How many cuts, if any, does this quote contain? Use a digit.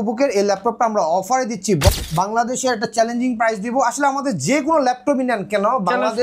1